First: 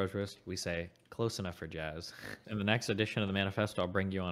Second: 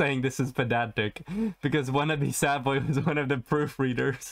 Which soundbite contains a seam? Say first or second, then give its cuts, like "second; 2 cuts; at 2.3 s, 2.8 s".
first; 1 cut; at 2.4 s